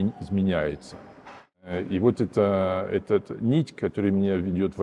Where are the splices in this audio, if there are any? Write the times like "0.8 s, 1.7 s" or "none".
1.7 s